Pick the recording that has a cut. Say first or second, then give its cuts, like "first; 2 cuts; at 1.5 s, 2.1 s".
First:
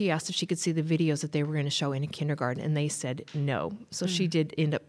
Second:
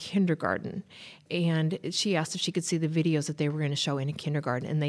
second; 1 cut; at 1.2 s